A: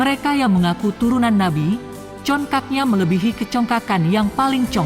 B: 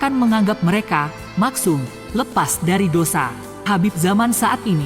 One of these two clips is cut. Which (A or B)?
B